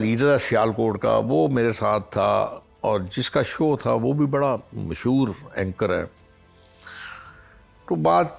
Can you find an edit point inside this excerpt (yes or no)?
no